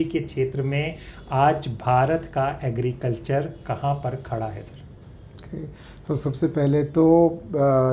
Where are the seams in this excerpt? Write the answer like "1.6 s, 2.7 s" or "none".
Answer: none